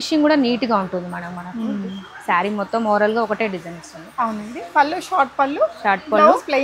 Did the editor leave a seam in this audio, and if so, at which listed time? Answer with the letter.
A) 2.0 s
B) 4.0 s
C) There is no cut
C